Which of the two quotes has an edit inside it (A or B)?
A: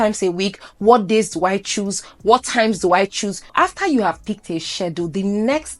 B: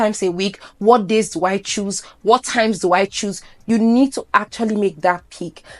A